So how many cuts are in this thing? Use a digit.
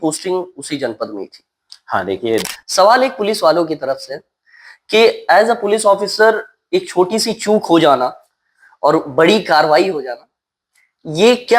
1